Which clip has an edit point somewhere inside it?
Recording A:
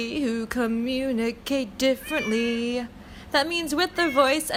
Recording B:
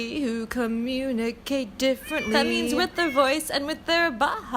B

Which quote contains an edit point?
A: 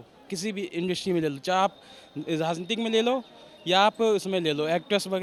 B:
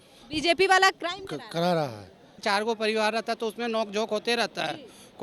B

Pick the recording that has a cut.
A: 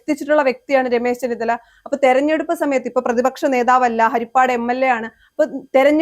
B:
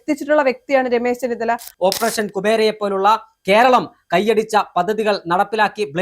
B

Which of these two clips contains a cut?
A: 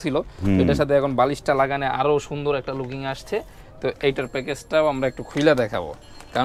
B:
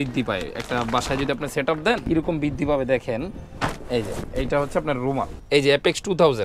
B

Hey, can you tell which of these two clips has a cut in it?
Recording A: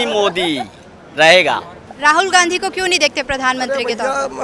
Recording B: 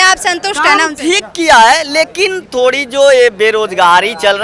A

